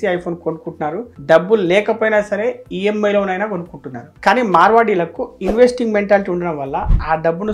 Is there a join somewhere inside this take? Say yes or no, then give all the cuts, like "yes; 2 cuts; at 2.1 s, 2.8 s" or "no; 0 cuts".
no; 0 cuts